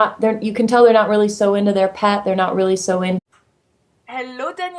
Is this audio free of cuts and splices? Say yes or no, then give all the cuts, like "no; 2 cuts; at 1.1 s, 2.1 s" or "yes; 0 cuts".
yes; 0 cuts